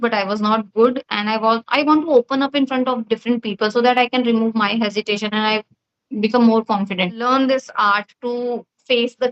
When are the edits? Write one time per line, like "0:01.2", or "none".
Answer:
0:07.2